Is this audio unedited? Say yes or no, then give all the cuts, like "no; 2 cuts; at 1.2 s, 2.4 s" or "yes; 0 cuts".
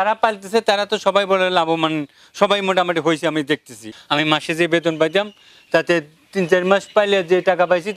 no; 1 cut; at 3.9 s